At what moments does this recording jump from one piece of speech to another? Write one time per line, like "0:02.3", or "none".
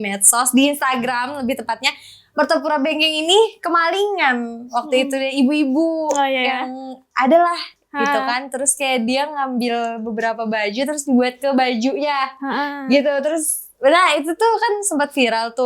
none